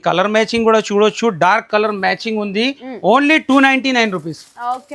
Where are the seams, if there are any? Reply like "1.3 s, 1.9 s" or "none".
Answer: none